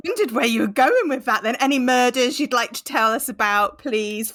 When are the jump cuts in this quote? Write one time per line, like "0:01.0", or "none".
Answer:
none